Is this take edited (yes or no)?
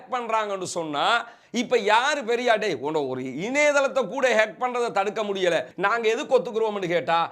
yes